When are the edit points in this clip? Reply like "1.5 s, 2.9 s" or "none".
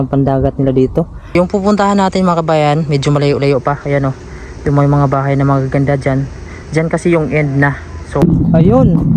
1.2 s, 8.2 s